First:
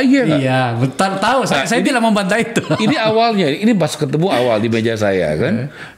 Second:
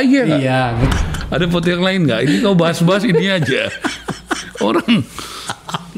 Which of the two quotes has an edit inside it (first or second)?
second